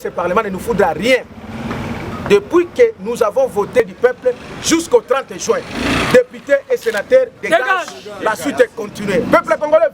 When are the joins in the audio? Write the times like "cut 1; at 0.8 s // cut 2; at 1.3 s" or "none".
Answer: cut 1; at 3.8 s